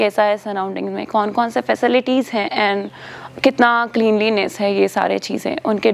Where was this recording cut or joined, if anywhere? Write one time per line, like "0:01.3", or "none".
none